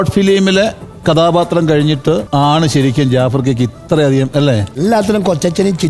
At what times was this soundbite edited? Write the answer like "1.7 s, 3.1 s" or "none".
2.3 s, 4.7 s

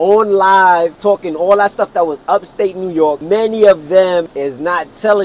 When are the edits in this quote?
1.0 s, 3.2 s, 4.3 s

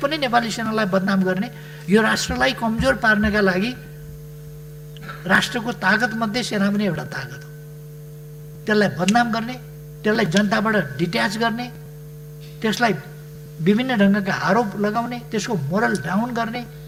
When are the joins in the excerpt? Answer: none

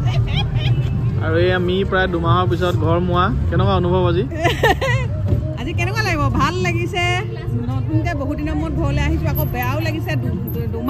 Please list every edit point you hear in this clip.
none

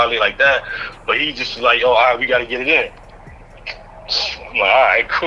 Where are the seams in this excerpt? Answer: none

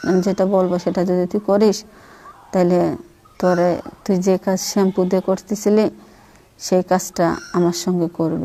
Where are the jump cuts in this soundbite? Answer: none

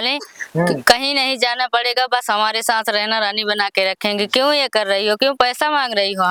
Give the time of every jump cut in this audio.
none

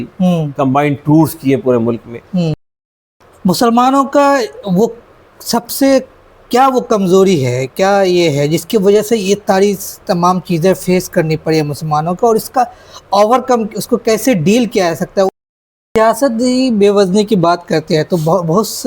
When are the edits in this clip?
2.7 s, 15.5 s

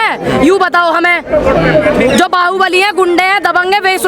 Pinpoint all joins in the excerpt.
none

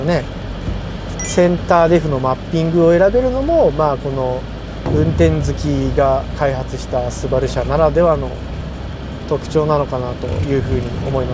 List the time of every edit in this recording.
none

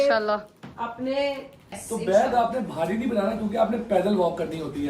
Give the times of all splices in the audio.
1.8 s

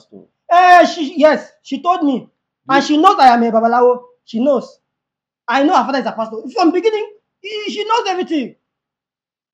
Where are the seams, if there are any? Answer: none

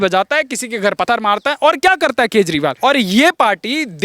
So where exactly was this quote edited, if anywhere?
1.0 s, 2.8 s

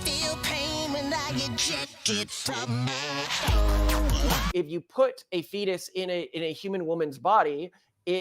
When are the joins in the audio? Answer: 4.5 s

